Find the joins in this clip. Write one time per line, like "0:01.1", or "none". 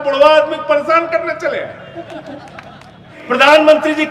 0:03.1